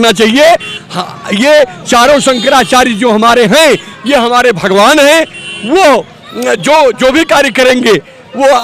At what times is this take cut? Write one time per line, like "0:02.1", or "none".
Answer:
none